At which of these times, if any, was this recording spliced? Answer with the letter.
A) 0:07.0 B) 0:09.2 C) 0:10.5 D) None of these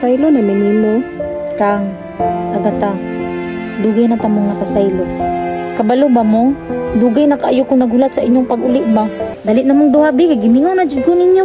B